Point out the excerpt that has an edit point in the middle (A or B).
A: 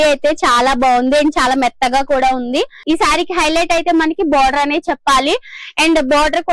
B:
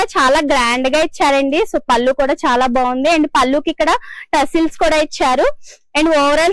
A